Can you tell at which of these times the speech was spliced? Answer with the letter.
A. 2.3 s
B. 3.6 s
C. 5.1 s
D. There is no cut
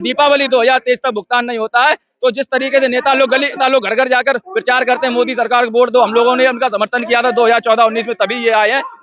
B